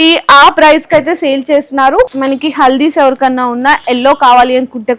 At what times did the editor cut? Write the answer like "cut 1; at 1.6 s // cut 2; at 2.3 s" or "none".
cut 1; at 2.1 s